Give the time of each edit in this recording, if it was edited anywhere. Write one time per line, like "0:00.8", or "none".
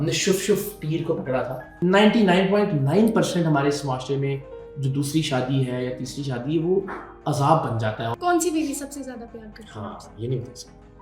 0:01.8
0:08.1